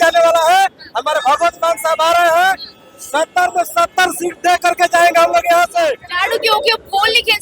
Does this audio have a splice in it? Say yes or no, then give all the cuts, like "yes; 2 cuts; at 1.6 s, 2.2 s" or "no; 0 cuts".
yes; 1 cut; at 6.1 s